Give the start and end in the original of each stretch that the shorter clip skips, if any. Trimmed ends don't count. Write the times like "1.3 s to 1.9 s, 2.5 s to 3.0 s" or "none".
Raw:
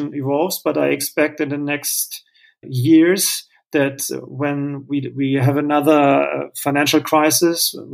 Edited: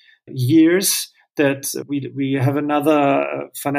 4.2 s to 4.8 s